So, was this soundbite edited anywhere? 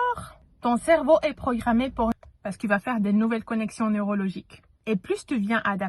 yes; 1 cut; at 2.1 s

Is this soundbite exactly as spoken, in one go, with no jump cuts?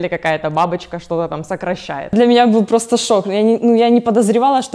no; 1 cut; at 2.1 s

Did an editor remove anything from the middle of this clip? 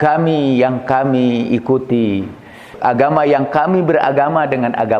no; 0 cuts

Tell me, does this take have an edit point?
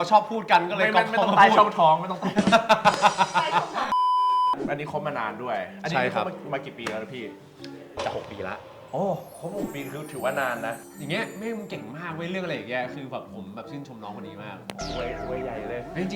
yes; 2 cuts; at 4.6 s, 11.0 s

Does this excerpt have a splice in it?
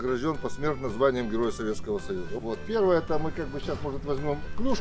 yes; 1 cut; at 2.3 s

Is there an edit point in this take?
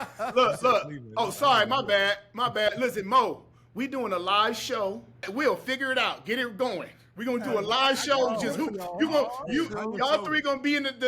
yes; 1 cut; at 5.3 s

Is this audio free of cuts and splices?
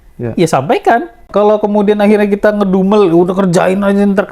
no; 1 cut; at 1.3 s

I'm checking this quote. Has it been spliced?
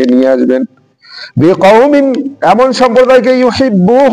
no; 0 cuts

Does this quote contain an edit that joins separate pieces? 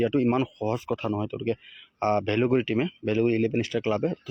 no; 0 cuts

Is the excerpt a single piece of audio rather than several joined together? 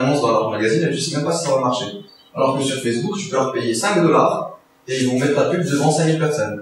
yes; 0 cuts

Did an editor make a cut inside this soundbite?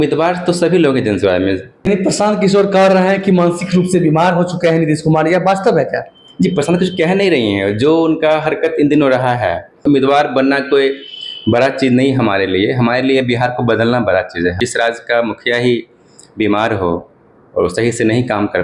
yes; 3 cuts; at 1.9 s, 9.8 s, 14.6 s

